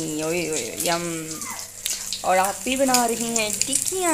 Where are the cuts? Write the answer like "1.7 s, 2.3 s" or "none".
none